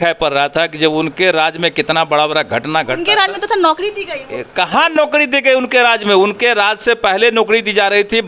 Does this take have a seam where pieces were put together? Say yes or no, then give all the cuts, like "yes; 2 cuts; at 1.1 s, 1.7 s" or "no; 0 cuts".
no; 0 cuts